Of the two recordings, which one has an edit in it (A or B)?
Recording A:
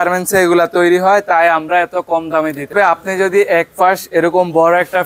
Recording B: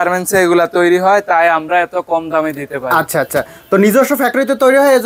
A